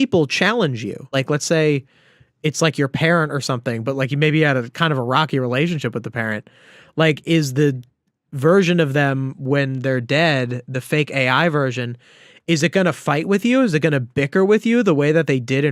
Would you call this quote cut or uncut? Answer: cut